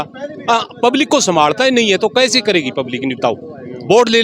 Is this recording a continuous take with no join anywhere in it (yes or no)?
yes